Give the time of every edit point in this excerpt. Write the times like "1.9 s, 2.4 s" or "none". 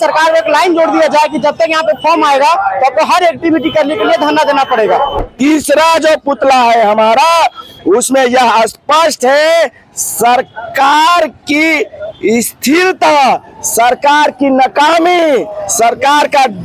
5.2 s

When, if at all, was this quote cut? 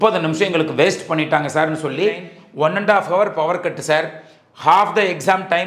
2.4 s

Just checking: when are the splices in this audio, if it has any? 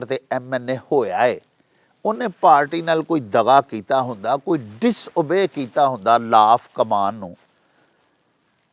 none

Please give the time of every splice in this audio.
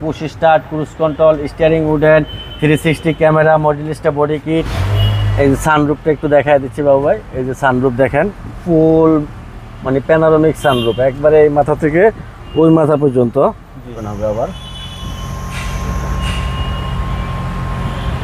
4.8 s, 13.9 s

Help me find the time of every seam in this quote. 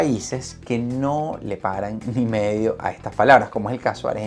none

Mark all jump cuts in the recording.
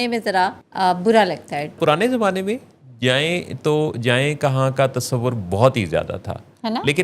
1.8 s

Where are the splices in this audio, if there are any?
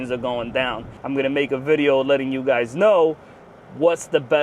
0.9 s

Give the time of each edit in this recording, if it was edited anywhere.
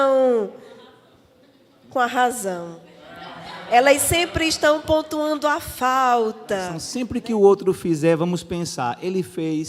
6.8 s

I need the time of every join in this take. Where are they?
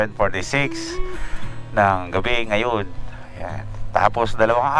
none

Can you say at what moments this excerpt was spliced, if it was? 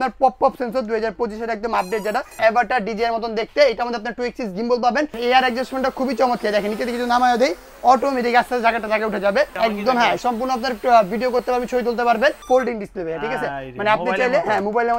2.3 s, 5.1 s, 9.5 s, 12.4 s

